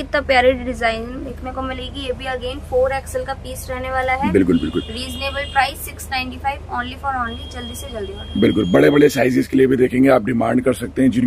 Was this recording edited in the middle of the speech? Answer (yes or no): no